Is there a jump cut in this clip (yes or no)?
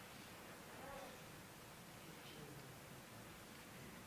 no